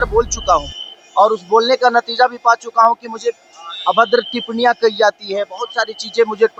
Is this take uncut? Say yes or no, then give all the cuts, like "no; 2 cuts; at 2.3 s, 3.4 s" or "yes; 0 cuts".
yes; 0 cuts